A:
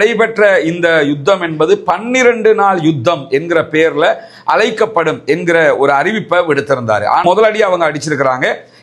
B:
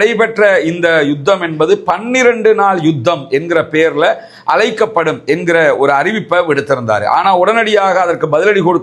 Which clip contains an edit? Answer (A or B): A